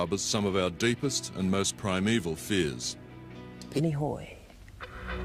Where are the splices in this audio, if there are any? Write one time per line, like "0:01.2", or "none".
none